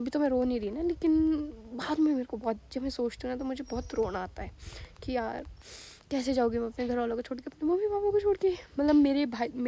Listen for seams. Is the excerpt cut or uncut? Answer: uncut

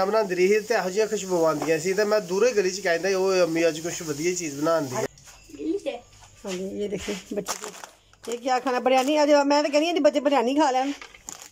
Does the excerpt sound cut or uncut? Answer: cut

